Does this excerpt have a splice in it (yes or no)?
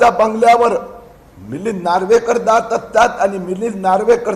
no